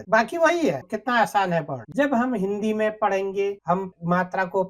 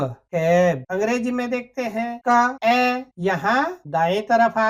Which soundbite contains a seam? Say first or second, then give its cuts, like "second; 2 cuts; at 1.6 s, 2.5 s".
first; 1 cut; at 1.8 s